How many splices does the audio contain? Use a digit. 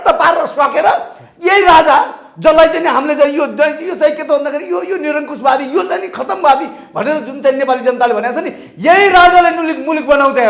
0